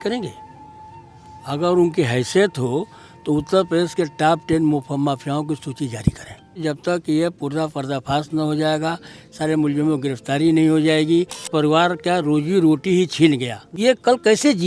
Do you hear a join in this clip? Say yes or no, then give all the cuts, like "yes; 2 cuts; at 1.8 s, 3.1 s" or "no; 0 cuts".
yes; 3 cuts; at 6.6 s, 11.5 s, 13.6 s